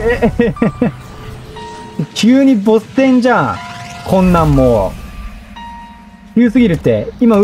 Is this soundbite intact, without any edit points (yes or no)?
yes